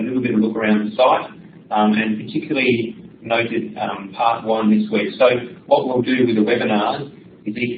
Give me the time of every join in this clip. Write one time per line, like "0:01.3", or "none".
0:04.9